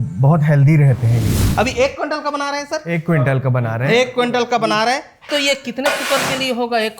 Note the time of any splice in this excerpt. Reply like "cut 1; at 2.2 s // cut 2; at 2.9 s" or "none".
cut 1; at 1.3 s // cut 2; at 5.2 s